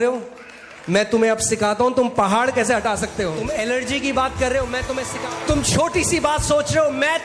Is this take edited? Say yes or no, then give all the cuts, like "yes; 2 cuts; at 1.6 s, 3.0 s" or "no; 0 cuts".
yes; 2 cuts; at 3.4 s, 5.1 s